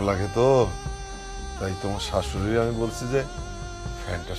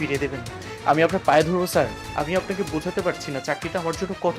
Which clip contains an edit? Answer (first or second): second